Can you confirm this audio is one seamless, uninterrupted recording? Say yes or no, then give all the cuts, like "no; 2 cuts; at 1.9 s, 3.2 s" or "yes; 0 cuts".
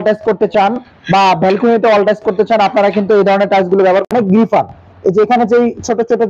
no; 1 cut; at 4.1 s